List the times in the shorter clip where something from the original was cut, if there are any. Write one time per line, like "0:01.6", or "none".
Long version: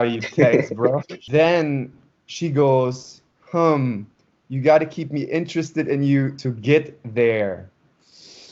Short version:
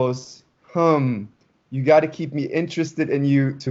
none